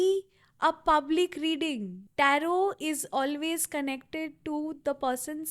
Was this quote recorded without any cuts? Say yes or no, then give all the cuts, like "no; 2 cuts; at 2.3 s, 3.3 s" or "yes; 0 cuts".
no; 1 cut; at 2.0 s